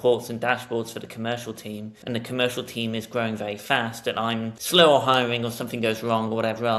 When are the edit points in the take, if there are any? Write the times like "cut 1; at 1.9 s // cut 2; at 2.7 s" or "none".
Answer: cut 1; at 1.9 s // cut 2; at 4.6 s